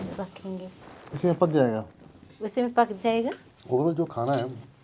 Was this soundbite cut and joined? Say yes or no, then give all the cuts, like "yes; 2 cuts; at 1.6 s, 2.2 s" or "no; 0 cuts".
yes; 2 cuts; at 0.9 s, 3.5 s